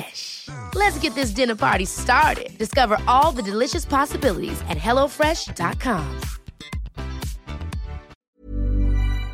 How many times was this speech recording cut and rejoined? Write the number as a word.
one